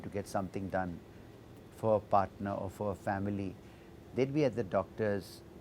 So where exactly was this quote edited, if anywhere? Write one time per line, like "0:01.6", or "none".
none